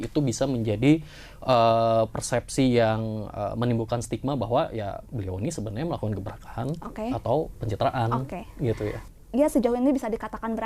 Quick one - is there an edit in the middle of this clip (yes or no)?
yes